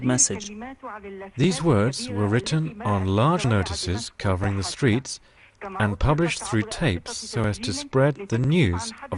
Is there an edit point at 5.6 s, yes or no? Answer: yes